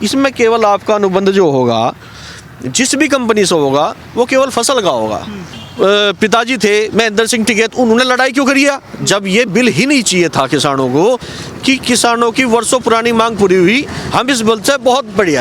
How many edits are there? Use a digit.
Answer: 2